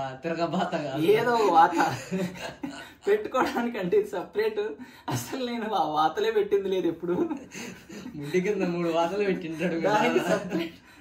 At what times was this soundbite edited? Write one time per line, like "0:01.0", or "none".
none